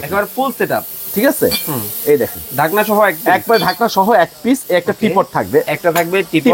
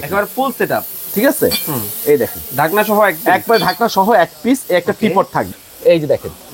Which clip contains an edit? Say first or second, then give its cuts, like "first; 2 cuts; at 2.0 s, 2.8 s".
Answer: second; 1 cut; at 5.5 s